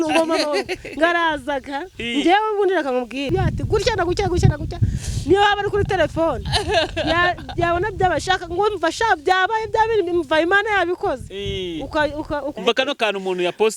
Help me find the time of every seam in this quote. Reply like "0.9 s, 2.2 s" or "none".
3.3 s, 12.5 s